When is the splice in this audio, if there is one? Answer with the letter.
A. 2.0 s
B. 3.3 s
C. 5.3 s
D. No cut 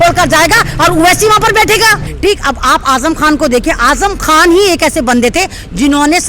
A